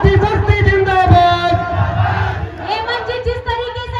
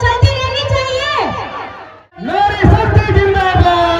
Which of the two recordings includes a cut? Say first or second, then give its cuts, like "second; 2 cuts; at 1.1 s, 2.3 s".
second; 1 cut; at 2.1 s